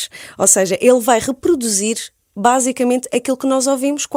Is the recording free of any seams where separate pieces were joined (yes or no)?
yes